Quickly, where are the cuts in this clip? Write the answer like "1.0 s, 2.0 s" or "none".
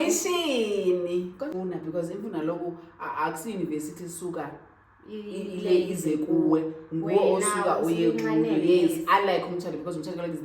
1.5 s